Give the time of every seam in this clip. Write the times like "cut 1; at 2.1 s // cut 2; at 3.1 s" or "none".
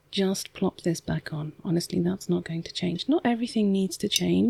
none